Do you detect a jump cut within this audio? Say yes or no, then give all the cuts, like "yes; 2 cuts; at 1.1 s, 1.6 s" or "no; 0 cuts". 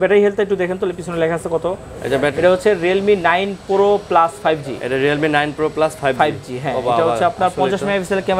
yes; 1 cut; at 2.3 s